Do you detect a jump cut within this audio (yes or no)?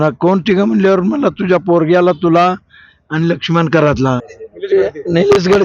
yes